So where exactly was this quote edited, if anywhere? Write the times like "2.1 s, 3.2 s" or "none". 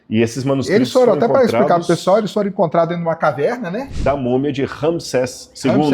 3.9 s